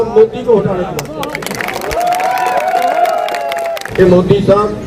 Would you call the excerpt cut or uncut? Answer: cut